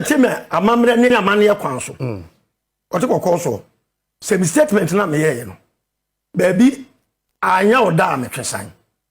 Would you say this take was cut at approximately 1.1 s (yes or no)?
yes